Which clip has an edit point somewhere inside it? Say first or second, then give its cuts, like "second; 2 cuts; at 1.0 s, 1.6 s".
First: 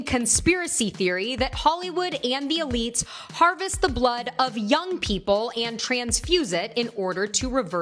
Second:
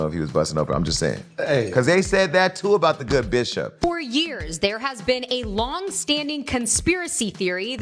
second; 1 cut; at 3.8 s